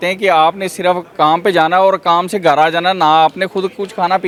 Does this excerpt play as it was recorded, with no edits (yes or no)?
yes